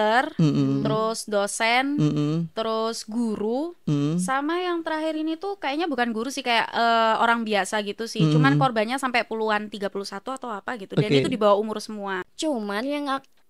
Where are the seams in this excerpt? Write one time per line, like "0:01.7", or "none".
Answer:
0:12.3

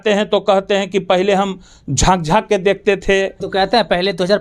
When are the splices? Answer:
0:03.4

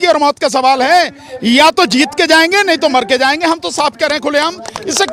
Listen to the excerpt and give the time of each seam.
none

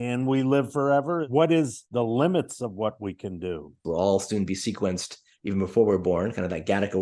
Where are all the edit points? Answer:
0:01.2
0:03.8

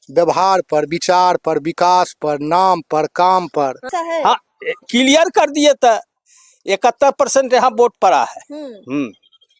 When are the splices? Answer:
0:03.9

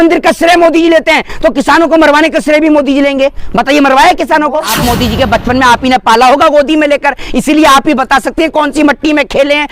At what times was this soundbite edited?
0:04.7

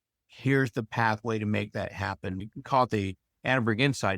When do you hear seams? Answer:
0:02.4

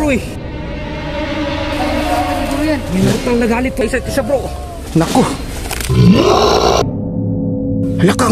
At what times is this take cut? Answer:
0:06.8

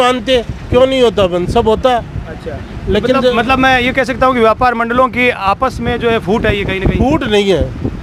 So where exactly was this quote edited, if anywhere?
none

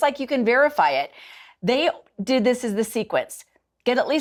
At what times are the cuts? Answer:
none

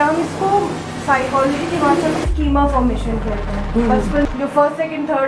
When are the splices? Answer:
0:04.3

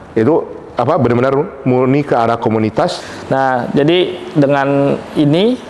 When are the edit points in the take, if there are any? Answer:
0:03.1

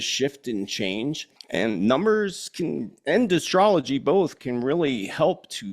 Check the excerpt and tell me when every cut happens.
0:01.3

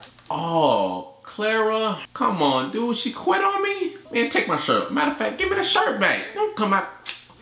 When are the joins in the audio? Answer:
0:02.1
0:04.0

